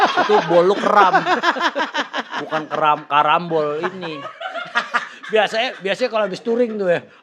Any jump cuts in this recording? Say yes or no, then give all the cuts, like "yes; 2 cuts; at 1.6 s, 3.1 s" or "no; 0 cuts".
no; 0 cuts